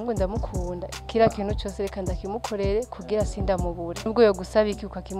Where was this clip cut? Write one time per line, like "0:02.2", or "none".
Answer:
0:04.1